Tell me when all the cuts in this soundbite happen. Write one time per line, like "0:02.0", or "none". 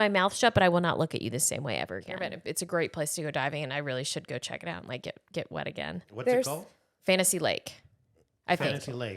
0:02.3